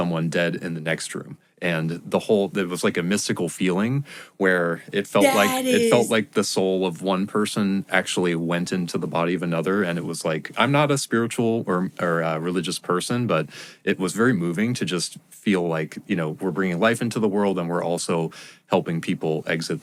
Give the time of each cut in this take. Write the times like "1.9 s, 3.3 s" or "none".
none